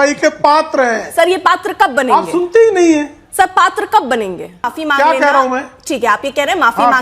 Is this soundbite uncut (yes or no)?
no